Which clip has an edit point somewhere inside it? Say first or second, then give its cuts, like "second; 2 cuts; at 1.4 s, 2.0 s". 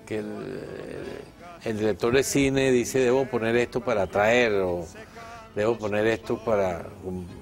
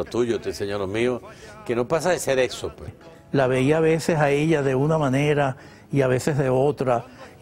second; 1 cut; at 3.0 s